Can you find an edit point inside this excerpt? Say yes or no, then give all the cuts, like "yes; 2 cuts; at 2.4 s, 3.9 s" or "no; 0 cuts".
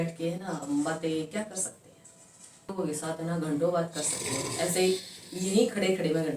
yes; 1 cut; at 2.7 s